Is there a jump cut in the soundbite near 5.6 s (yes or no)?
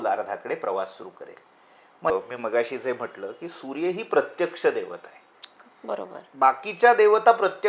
no